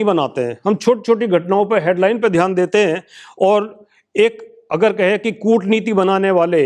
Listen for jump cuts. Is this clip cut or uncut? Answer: uncut